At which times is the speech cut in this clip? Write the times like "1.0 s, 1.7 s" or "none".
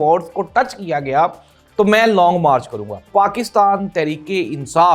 3.1 s